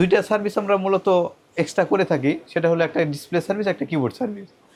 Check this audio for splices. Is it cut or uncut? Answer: uncut